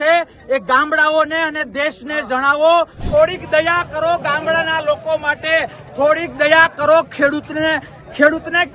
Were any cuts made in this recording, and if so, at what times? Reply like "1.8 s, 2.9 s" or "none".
3.0 s